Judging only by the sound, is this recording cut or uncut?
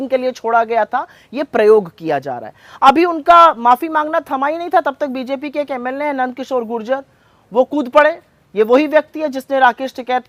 uncut